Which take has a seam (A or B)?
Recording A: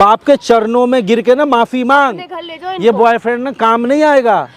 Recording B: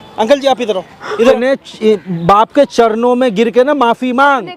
B